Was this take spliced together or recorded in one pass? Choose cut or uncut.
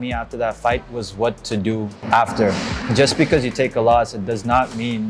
cut